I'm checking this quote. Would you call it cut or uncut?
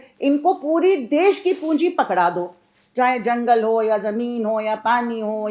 uncut